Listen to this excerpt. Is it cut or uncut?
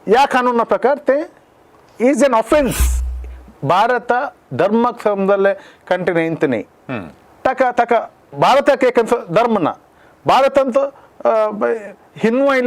cut